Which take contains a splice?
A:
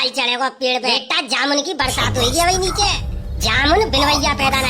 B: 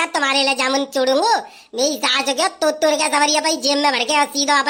A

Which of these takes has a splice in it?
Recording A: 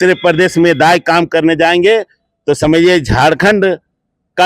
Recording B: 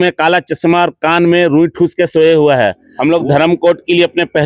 B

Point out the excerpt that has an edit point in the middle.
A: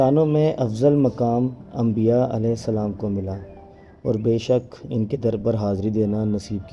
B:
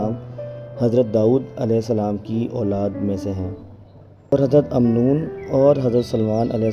B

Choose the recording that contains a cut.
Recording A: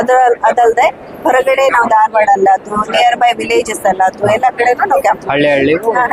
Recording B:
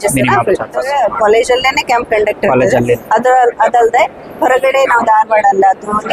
B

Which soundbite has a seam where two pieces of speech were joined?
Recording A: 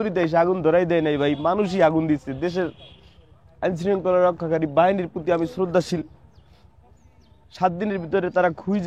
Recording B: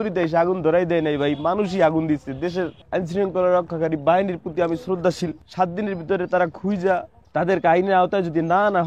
B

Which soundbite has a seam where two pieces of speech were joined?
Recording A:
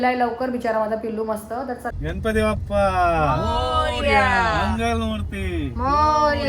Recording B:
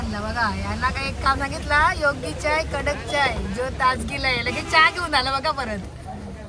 A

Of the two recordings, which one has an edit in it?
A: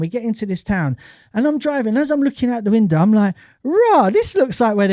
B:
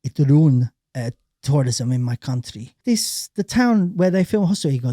B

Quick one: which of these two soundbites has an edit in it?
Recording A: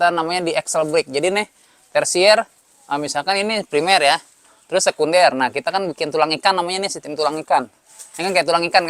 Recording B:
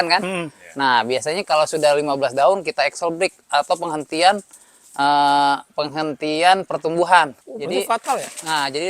B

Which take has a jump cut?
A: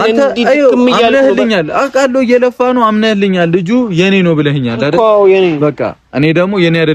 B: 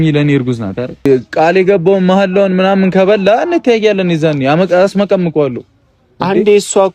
B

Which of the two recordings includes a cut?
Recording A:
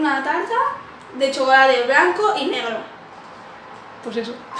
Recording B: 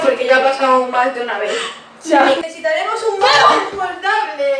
B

